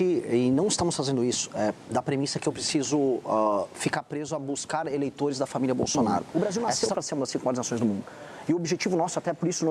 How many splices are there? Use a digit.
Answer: 1